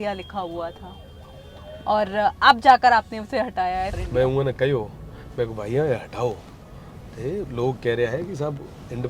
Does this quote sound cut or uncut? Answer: cut